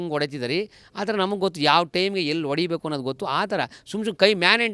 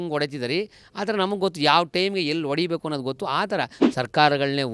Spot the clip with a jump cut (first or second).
second